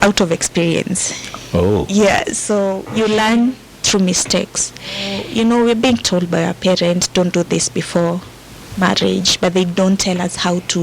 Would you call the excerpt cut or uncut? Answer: cut